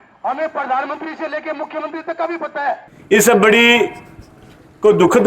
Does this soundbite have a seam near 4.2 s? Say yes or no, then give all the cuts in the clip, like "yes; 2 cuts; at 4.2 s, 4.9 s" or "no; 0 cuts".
no; 1 cut; at 2.9 s